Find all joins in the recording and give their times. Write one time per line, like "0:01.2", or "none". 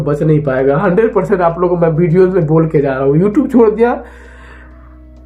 none